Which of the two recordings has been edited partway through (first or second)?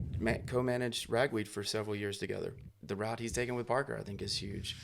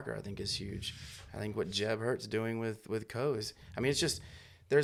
first